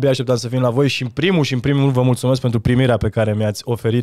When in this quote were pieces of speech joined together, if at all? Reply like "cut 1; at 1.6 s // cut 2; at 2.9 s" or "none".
none